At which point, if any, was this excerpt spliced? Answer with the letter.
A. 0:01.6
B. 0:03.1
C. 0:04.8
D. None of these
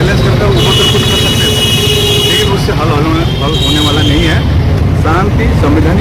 D